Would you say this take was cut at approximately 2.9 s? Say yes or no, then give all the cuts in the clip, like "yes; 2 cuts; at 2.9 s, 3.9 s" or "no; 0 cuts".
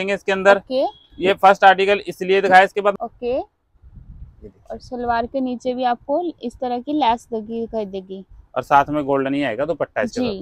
yes; 1 cut; at 2.9 s